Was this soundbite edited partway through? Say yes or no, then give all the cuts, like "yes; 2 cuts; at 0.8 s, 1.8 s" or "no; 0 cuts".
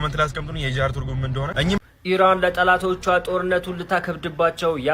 yes; 1 cut; at 1.8 s